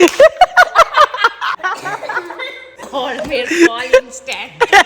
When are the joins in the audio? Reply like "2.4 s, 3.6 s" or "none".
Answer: 1.6 s, 2.8 s